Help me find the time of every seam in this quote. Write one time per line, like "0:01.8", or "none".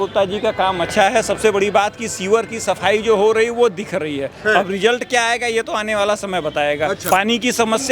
0:07.0